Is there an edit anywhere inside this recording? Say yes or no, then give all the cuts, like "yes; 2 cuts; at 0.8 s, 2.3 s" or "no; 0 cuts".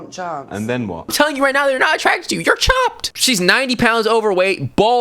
yes; 2 cuts; at 1.1 s, 3.1 s